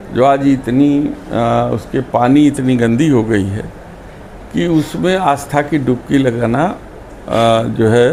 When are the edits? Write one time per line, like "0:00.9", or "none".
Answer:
none

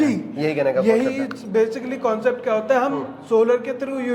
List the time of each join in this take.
none

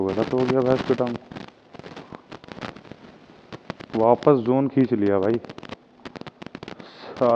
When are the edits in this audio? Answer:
none

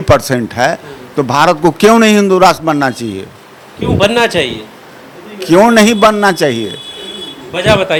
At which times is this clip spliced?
none

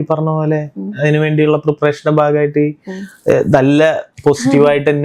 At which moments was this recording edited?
none

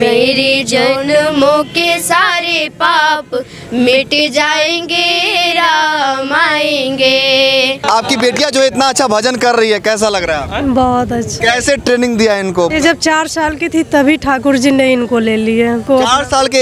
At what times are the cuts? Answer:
0:07.8
0:11.4
0:12.7
0:15.8

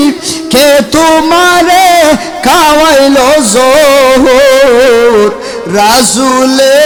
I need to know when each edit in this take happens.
none

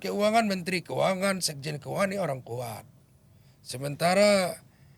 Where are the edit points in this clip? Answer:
none

